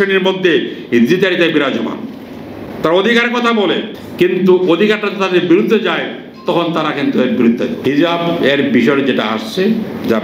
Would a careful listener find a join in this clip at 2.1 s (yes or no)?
no